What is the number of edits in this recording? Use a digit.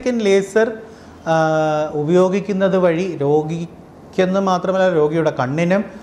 0